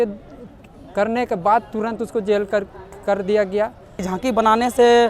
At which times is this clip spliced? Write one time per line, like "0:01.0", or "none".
0:04.0